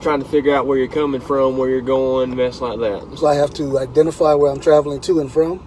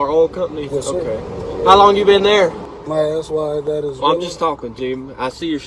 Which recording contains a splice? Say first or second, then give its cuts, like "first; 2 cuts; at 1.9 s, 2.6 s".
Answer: second; 1 cut; at 2.7 s